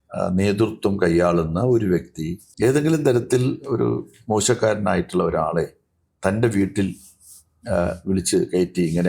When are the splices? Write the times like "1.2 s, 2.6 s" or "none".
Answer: 2.4 s